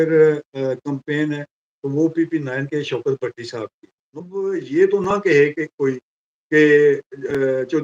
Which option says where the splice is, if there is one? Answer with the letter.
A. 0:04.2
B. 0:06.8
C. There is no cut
A